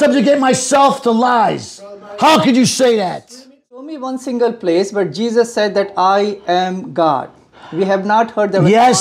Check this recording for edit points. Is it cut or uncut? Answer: cut